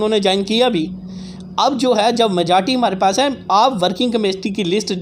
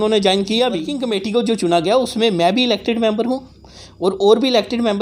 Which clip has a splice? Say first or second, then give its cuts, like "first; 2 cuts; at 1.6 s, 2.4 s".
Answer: second; 1 cut; at 0.9 s